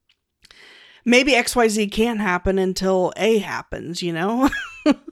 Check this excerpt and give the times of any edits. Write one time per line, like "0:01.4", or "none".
none

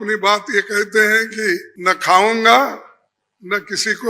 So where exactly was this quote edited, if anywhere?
0:01.7

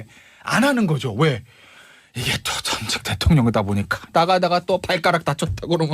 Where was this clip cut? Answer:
0:04.0

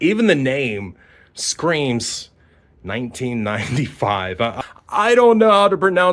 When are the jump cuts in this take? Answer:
0:04.6

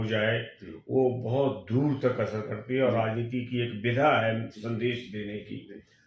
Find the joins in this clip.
none

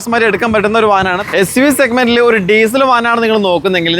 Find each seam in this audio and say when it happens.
0:01.3

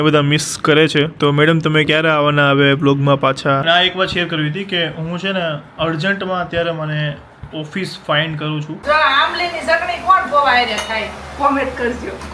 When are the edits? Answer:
0:03.6
0:08.7

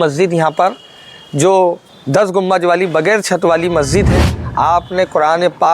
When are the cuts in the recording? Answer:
0:01.9
0:04.4

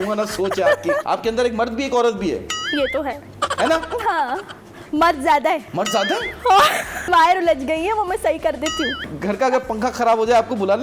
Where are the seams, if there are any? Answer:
0:01.0
0:05.7
0:07.1
0:09.0

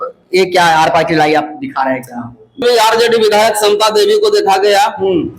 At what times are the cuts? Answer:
0:02.6

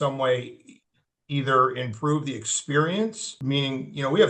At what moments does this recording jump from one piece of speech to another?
0:03.3

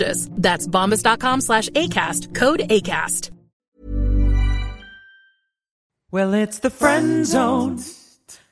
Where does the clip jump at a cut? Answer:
0:06.1

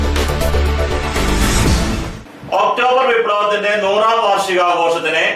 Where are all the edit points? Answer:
0:02.1

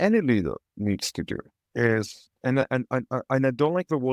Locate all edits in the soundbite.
0:01.6
0:02.2

